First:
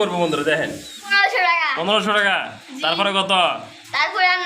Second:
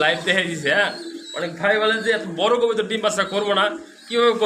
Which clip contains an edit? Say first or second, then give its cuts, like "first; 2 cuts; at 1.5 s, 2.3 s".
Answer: first; 1 cut; at 1.2 s